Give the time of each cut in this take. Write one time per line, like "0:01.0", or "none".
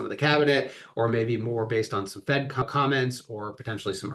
0:02.6